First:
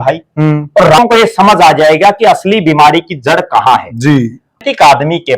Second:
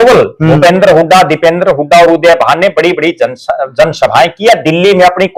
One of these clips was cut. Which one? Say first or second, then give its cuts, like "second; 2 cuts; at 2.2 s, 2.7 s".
first; 2 cuts; at 1.0 s, 4.6 s